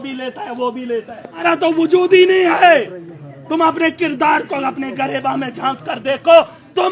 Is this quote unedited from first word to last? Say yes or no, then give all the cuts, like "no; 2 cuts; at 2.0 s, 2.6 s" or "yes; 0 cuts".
no; 1 cut; at 1.4 s